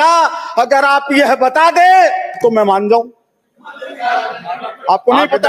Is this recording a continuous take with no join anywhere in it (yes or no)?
yes